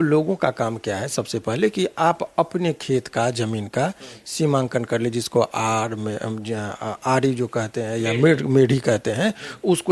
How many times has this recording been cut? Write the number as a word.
zero